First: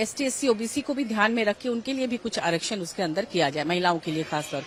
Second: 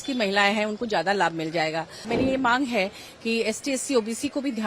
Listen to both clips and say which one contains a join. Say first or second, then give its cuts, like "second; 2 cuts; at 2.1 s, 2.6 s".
second; 1 cut; at 2.1 s